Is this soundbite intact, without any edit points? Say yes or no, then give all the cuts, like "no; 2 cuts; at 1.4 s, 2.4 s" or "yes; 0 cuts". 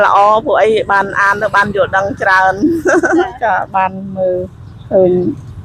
yes; 0 cuts